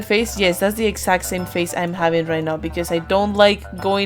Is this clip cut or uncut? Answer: uncut